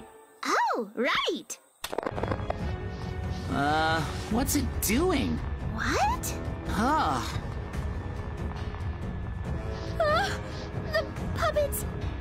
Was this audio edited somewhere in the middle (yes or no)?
yes